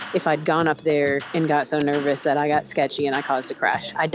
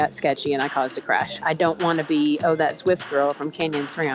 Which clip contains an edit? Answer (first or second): first